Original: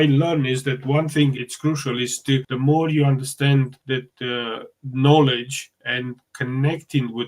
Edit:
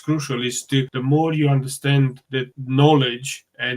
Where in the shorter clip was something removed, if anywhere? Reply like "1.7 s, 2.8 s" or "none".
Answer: 2.6 s